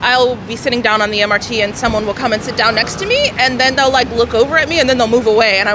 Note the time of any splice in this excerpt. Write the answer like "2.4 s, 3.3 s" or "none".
none